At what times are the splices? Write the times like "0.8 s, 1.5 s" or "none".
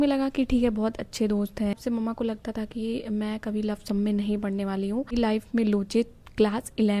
1.8 s, 5.1 s